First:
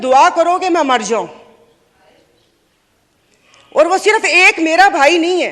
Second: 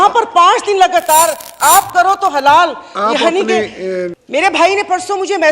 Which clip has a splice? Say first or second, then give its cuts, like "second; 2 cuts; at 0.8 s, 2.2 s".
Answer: second; 1 cut; at 4.2 s